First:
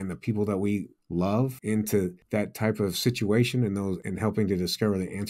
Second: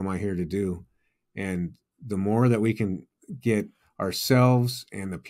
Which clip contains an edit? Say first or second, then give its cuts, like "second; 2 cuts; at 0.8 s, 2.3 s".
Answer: first; 3 cuts; at 1.4 s, 2.2 s, 4.0 s